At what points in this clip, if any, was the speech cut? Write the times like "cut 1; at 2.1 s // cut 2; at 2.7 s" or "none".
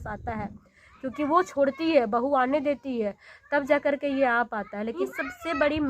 cut 1; at 5.0 s